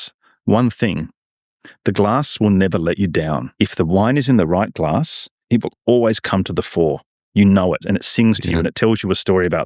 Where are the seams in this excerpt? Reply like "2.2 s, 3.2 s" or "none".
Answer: 3.5 s, 7.8 s